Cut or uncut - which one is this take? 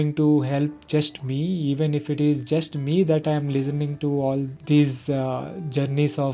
uncut